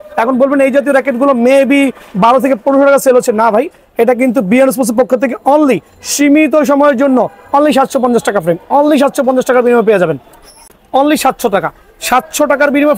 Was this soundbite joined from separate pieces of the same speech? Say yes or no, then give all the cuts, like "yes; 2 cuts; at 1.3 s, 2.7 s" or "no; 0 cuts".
yes; 1 cut; at 10.7 s